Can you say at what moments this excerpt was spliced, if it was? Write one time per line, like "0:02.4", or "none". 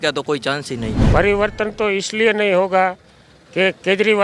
0:01.0